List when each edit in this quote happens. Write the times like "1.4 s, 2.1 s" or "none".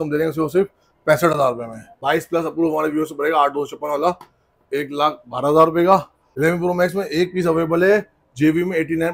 2.0 s, 6.2 s